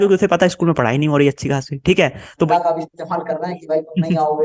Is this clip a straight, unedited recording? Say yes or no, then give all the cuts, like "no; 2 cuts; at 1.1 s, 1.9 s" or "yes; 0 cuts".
no; 1 cut; at 2.5 s